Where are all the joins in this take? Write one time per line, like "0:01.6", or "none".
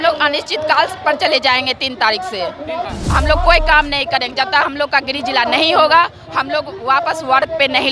0:02.9